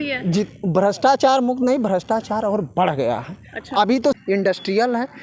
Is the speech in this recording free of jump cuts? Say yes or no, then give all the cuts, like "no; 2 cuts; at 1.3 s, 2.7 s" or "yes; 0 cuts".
no; 1 cut; at 4.2 s